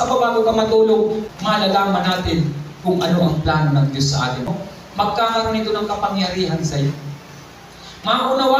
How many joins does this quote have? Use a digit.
2